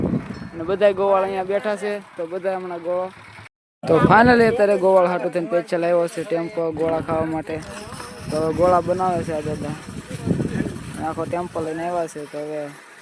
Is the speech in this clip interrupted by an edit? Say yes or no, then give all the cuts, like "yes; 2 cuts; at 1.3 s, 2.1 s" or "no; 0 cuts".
yes; 1 cut; at 3.6 s